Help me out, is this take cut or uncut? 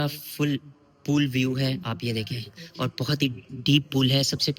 uncut